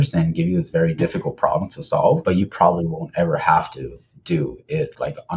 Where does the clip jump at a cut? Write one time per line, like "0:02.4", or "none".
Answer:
0:02.2

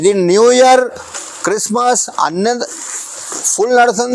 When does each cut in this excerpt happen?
none

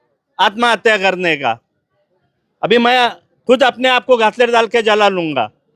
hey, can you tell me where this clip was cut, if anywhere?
none

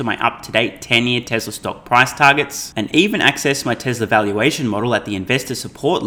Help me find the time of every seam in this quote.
none

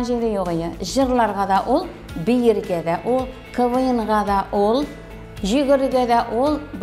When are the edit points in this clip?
none

